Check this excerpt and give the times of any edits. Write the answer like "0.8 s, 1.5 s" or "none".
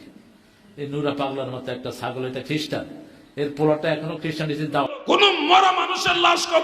4.9 s